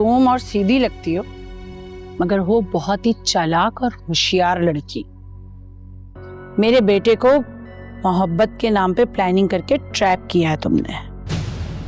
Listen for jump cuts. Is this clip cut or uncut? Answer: uncut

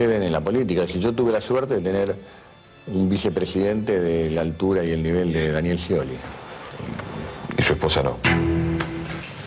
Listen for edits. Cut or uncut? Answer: uncut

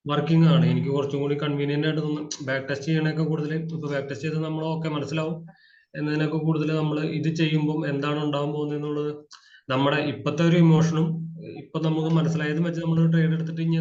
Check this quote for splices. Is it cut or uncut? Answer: uncut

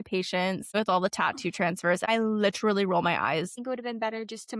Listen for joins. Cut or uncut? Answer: cut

